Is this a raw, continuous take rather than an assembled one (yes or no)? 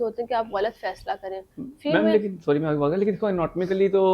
yes